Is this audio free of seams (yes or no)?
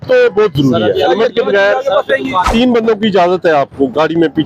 no